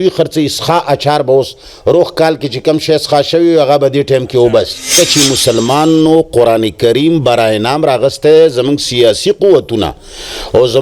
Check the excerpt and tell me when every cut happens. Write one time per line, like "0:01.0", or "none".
0:04.9